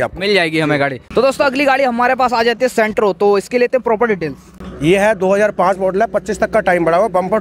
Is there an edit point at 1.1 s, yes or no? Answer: no